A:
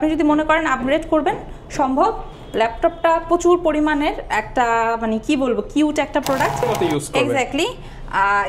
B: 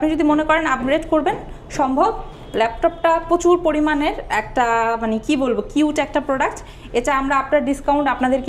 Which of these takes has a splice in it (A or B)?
A